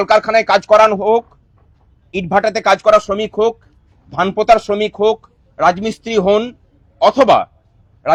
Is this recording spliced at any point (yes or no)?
no